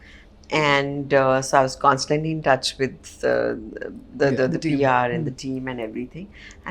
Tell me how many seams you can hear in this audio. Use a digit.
0